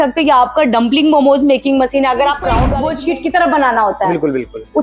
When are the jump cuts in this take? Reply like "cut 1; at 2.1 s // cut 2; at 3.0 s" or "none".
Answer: cut 1; at 2.7 s